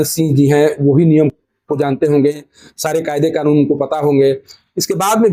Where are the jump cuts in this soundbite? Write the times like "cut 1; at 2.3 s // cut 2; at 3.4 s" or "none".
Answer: none